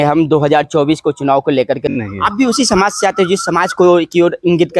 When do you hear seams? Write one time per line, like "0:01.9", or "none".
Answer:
0:02.0